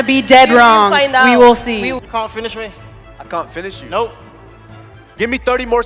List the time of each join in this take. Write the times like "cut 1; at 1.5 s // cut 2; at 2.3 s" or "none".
cut 1; at 2.1 s